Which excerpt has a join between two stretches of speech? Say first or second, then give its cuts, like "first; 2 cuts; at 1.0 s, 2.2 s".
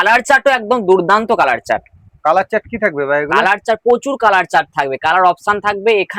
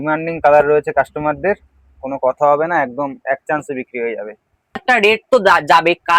second; 1 cut; at 4.8 s